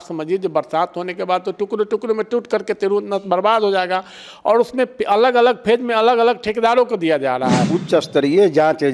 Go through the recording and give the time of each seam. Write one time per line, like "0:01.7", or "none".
0:07.7